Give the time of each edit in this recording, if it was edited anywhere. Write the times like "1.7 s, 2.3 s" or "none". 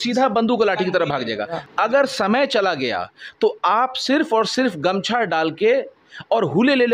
1.6 s